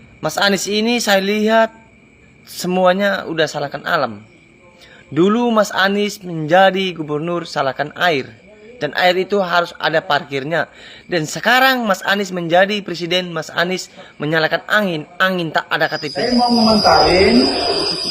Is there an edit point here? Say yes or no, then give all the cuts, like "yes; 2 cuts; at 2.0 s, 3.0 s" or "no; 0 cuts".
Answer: yes; 1 cut; at 16.3 s